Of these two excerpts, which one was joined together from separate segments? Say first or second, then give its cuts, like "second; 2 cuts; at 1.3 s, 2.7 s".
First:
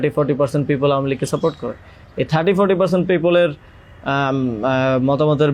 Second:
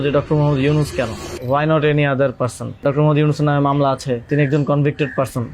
second; 3 cuts; at 1.3 s, 2.8 s, 4.3 s